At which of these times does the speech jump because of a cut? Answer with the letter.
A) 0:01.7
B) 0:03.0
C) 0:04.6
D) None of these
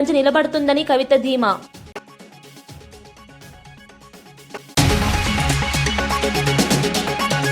C